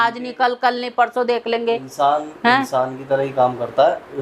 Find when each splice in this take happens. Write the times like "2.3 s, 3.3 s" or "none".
none